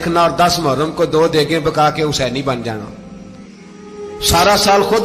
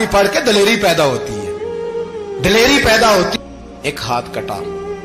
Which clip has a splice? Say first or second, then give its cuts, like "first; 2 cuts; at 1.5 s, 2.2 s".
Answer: second; 1 cut; at 3.3 s